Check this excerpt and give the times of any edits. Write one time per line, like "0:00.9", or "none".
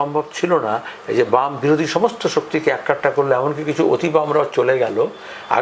none